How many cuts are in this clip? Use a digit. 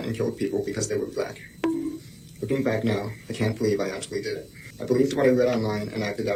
0